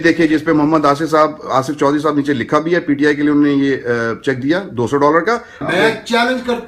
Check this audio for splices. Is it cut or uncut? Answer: cut